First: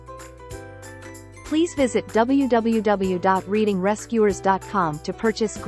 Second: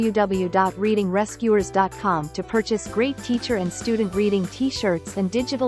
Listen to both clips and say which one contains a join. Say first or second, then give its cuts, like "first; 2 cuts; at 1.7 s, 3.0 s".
first; 1 cut; at 1.5 s